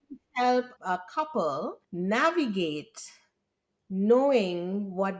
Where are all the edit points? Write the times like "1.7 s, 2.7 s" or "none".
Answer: 0.8 s, 1.8 s